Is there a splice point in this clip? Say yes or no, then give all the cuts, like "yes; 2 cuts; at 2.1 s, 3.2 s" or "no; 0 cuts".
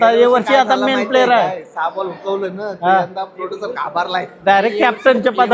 no; 0 cuts